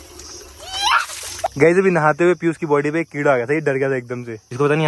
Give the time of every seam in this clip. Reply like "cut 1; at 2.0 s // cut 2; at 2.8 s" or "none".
cut 1; at 1.5 s